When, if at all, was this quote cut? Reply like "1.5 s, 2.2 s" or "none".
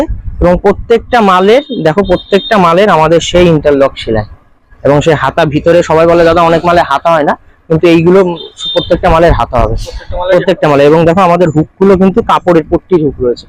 none